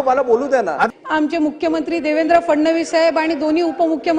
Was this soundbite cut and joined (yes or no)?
yes